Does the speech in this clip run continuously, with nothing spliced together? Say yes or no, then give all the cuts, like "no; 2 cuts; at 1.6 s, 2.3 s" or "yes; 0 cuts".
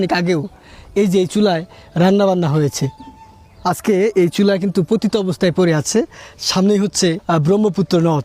no; 1 cut; at 7.2 s